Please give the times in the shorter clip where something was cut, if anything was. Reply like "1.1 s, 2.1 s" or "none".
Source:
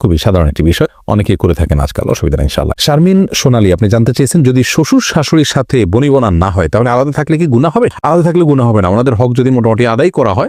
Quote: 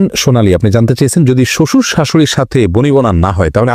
none